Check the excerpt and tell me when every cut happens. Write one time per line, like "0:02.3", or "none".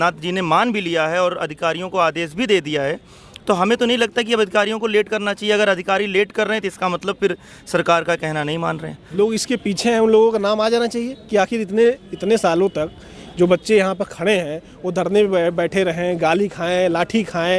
0:09.0